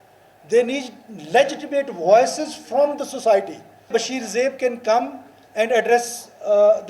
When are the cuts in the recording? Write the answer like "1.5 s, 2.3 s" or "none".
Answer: 3.9 s